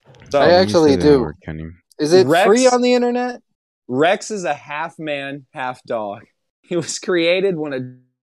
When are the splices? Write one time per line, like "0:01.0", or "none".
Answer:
none